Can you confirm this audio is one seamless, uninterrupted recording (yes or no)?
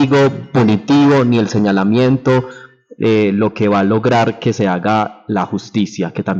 yes